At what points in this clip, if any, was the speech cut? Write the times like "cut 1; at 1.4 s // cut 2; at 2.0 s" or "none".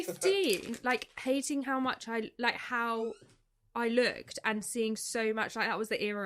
none